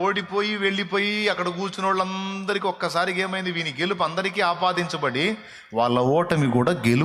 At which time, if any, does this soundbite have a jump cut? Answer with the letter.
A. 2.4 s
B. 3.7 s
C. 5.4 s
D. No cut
D